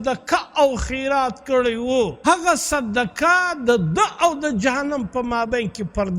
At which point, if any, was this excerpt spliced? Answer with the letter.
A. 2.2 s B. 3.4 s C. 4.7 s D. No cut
A